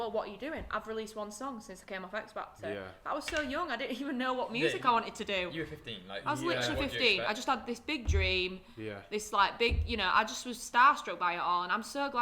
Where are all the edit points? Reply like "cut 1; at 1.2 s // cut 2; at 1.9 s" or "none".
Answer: none

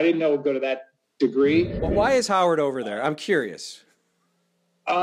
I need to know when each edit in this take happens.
cut 1; at 1.8 s

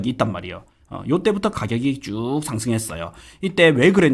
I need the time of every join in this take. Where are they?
none

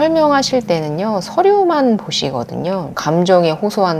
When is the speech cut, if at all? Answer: cut 1; at 3.0 s

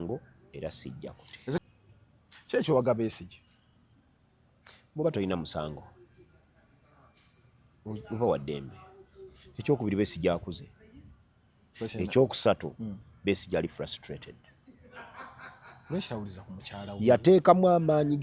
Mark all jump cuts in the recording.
cut 1; at 1.6 s

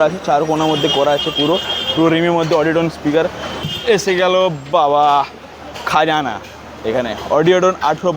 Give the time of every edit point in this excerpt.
cut 1; at 3.7 s

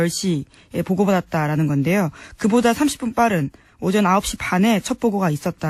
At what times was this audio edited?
cut 1; at 2.5 s

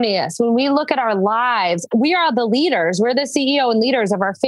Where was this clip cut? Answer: cut 1; at 1.8 s

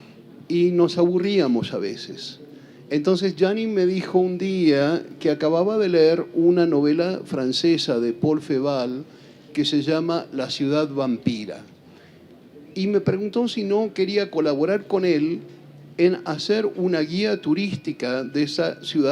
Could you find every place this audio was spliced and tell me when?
none

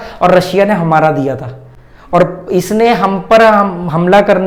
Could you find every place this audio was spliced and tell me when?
none

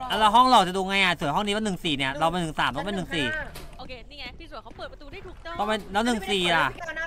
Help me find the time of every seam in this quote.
cut 1; at 3.7 s

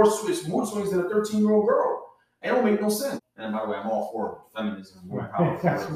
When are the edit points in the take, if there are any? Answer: cut 1; at 3.2 s

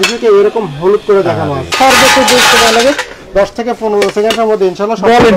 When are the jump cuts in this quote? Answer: cut 1; at 1.7 s

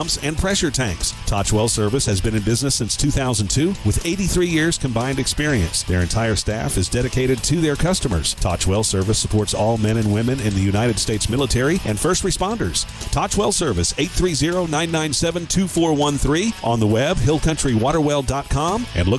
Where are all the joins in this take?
none

